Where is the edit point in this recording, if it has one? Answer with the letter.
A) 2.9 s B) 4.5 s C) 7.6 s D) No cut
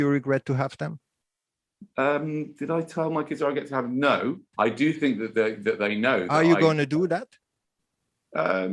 B